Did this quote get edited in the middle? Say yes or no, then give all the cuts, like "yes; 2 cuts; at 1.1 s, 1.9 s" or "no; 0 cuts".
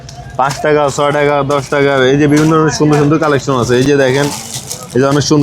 no; 0 cuts